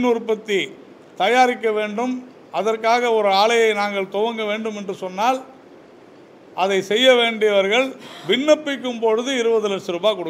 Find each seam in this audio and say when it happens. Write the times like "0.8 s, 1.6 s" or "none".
none